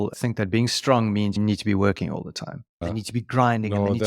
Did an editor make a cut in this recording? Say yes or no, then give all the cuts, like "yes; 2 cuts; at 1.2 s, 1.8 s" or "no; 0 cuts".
yes; 2 cuts; at 1.4 s, 2.8 s